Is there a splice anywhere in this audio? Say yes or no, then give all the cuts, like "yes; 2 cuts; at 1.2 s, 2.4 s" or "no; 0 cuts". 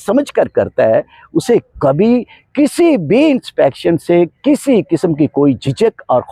no; 0 cuts